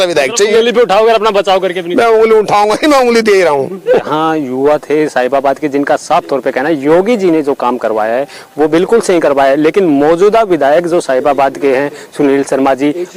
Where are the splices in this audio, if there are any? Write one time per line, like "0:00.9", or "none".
none